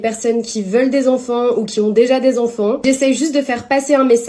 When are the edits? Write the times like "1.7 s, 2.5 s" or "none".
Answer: none